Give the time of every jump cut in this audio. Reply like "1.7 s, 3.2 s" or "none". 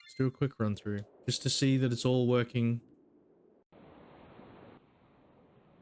1.1 s, 2.9 s, 4.8 s